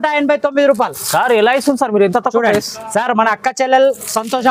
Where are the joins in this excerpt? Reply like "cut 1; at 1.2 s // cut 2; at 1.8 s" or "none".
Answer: none

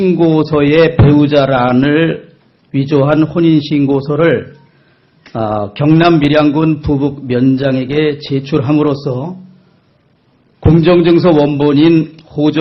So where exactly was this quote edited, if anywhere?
none

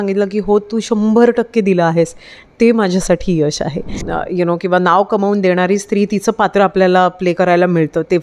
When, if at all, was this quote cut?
cut 1; at 4.0 s

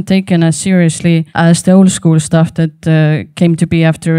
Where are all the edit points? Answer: cut 1; at 1.3 s

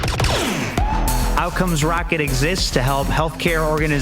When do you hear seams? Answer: none

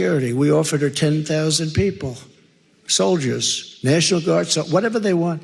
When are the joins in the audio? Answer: none

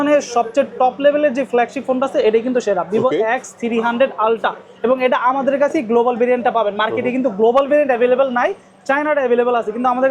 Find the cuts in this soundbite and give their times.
none

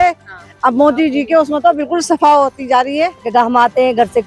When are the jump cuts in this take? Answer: cut 1; at 3.3 s

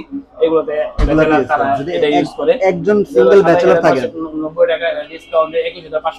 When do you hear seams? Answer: none

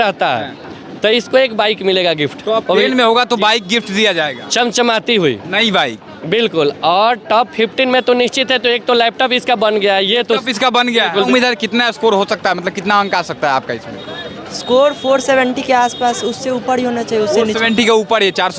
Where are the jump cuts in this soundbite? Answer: cut 1; at 11.3 s

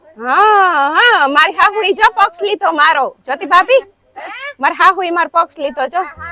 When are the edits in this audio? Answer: none

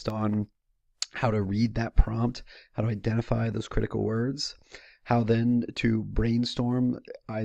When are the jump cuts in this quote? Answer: none

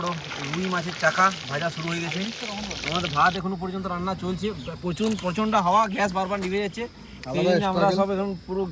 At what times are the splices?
cut 1; at 2.8 s

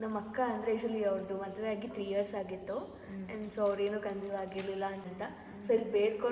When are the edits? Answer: cut 1; at 5.0 s

